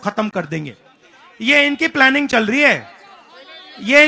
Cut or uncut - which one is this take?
uncut